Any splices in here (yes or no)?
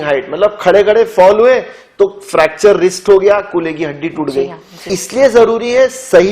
yes